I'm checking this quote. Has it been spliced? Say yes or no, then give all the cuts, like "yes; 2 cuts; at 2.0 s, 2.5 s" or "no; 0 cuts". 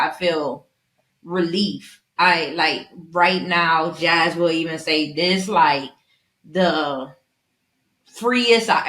no; 0 cuts